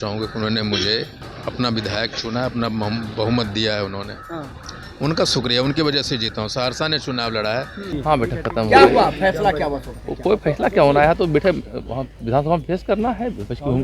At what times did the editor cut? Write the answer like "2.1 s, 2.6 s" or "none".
1.2 s, 7.9 s